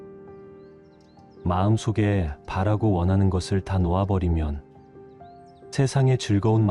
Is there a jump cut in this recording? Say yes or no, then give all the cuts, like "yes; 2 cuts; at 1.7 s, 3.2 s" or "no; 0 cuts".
yes; 1 cut; at 1.2 s